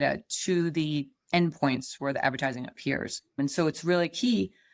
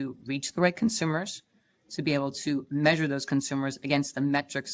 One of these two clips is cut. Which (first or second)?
first